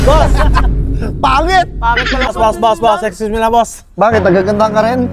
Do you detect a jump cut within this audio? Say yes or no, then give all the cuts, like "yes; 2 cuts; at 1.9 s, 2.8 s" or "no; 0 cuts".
yes; 1 cut; at 2.3 s